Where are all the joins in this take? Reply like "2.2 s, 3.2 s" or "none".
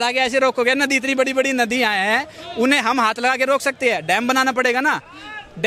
none